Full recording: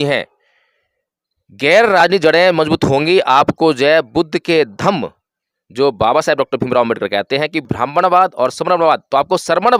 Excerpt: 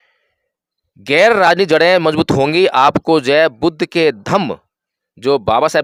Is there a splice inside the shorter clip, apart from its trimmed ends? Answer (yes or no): no